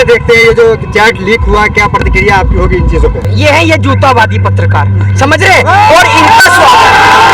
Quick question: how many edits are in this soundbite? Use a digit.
1